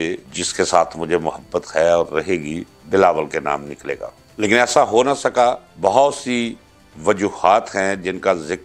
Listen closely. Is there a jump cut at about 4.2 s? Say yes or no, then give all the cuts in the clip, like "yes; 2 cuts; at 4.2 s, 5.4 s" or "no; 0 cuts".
no; 0 cuts